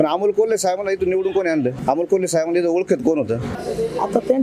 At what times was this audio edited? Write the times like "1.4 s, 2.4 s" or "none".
1.8 s, 3.5 s

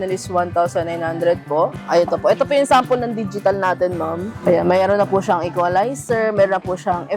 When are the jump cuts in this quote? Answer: 1.8 s

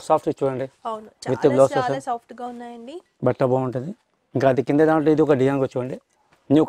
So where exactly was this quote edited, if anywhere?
none

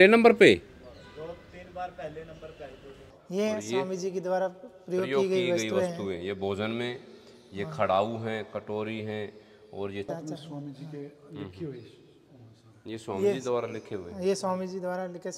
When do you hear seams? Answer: 3.2 s, 10.1 s

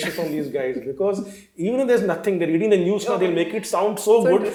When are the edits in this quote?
none

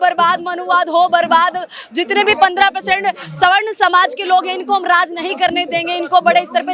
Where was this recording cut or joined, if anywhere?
none

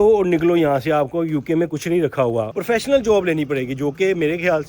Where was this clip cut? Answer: 2.5 s

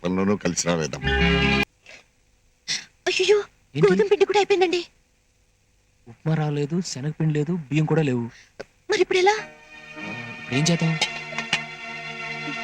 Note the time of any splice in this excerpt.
1.6 s

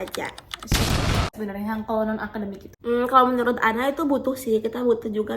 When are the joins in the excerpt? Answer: 1.3 s, 2.6 s

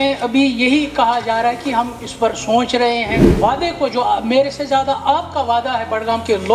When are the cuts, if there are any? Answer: 3.2 s

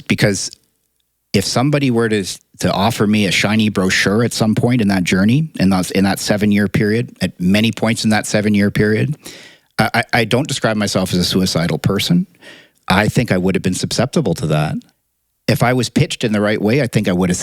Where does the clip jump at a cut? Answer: 12.6 s, 14.8 s

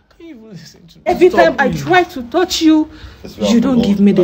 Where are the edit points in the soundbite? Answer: 1.1 s

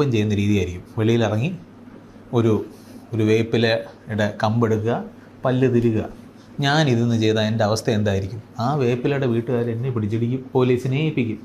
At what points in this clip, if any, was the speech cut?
10.4 s

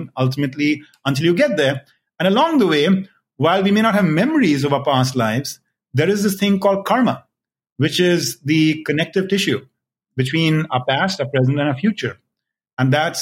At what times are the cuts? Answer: none

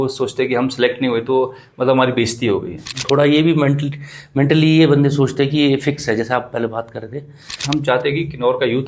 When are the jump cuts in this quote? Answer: 3.0 s, 7.5 s

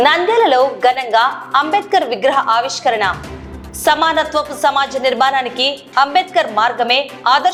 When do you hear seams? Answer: none

